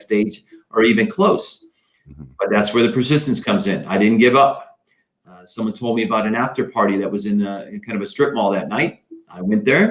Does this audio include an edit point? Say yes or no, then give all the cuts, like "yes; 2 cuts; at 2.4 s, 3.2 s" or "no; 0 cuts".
no; 0 cuts